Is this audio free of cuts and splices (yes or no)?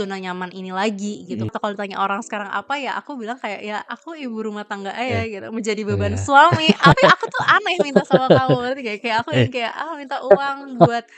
no